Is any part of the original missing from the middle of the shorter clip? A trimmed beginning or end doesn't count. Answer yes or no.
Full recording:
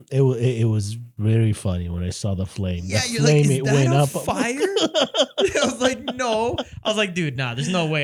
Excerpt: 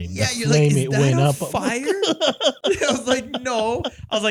no